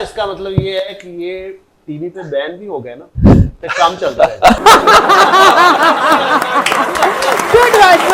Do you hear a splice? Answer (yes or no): no